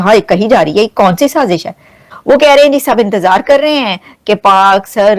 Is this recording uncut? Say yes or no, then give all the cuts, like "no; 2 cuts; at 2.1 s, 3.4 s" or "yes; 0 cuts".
no; 1 cut; at 2.1 s